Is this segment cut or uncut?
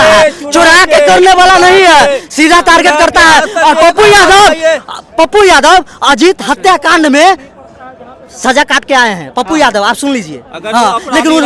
uncut